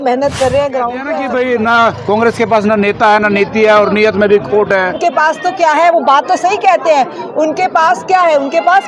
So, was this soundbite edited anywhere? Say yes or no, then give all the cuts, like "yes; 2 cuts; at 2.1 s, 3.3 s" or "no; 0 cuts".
yes; 2 cuts; at 1.1 s, 5.0 s